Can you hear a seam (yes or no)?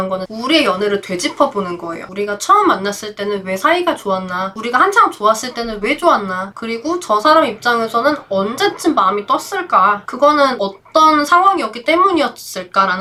no